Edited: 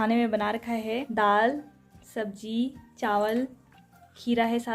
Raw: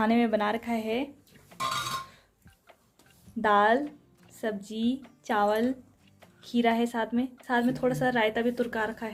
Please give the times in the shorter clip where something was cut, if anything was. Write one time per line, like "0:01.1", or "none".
0:01.1